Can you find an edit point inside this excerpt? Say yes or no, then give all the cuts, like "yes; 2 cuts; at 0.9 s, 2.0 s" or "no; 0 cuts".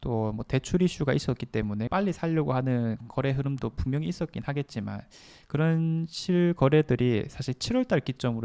yes; 1 cut; at 1.9 s